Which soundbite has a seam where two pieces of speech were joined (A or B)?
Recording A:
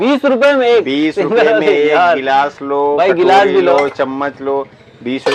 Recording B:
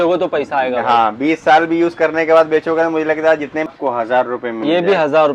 B